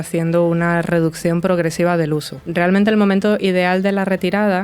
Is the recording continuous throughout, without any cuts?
no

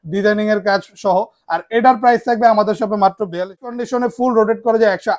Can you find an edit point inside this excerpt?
yes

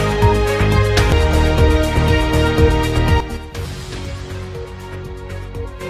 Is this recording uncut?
no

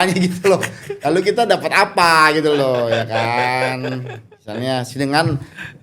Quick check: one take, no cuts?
yes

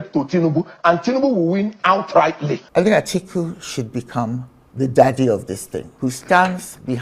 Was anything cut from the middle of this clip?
yes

